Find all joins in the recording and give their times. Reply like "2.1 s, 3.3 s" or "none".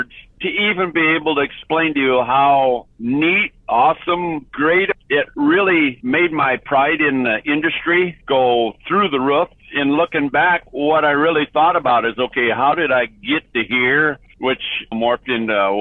4.9 s, 9.6 s